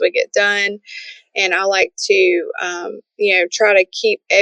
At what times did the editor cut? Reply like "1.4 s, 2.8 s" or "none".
none